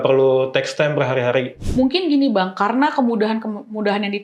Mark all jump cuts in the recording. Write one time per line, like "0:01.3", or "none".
0:01.6

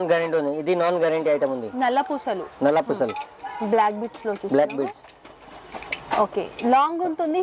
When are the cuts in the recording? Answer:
none

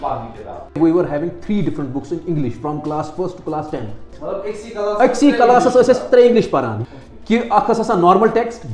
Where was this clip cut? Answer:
0:00.8
0:04.1
0:06.7

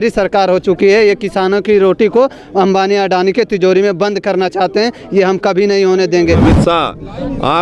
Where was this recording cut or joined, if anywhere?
0:06.4

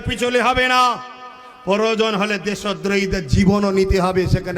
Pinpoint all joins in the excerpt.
none

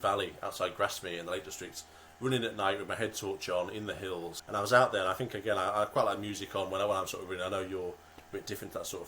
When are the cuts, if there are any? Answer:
0:04.4

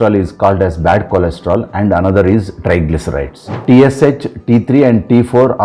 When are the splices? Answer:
0:03.6

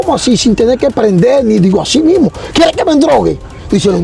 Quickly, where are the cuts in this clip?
none

